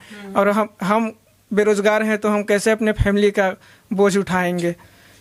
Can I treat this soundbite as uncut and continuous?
yes; 0 cuts

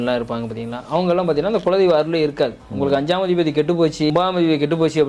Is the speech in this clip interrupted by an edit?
yes; 1 cut; at 4.1 s

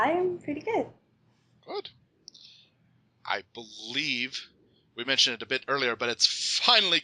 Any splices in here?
yes; 1 cut; at 3.7 s

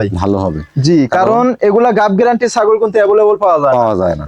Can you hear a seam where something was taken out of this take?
no; 0 cuts

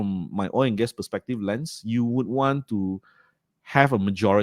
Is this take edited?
no; 0 cuts

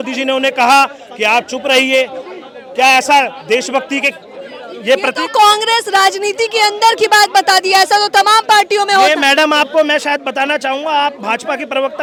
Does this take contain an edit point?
no; 0 cuts

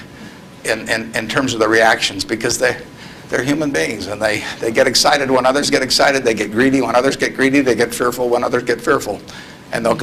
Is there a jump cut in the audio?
no; 0 cuts

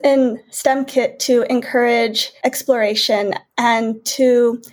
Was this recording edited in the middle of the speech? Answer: yes; 1 cut; at 2.2 s

